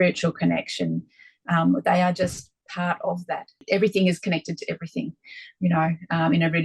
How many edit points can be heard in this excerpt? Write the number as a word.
one